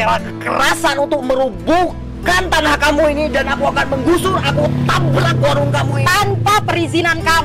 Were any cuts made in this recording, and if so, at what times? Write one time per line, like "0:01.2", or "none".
none